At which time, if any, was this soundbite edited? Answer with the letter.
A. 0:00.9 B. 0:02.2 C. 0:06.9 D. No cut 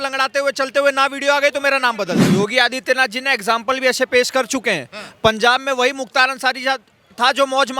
B